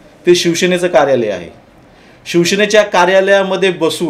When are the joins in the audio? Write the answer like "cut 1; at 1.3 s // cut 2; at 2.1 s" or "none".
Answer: none